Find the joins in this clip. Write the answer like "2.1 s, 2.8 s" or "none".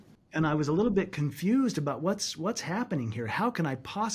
none